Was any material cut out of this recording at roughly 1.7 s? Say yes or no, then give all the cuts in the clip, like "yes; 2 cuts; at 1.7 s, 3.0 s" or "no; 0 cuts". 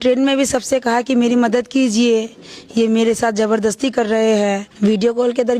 no; 1 cut; at 4.7 s